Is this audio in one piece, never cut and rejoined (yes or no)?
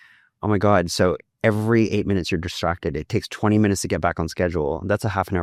yes